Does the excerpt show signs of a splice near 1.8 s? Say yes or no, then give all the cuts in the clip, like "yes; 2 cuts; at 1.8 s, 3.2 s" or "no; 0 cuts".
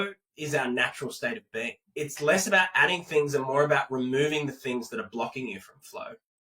yes; 1 cut; at 1.8 s